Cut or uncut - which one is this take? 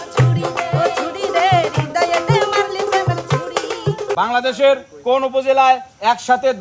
cut